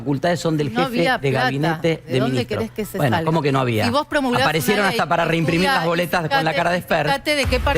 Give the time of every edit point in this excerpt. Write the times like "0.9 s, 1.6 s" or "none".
none